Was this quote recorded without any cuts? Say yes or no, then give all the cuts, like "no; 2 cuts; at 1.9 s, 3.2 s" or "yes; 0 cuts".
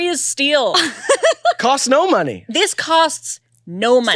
yes; 0 cuts